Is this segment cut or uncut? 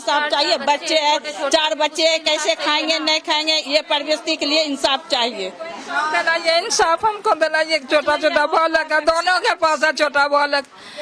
uncut